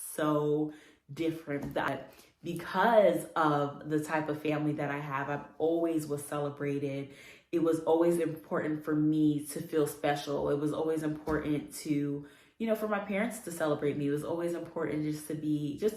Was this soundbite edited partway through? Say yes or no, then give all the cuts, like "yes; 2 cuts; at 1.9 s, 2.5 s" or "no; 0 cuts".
yes; 1 cut; at 1.9 s